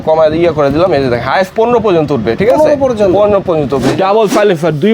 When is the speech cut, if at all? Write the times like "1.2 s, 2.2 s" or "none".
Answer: 3.9 s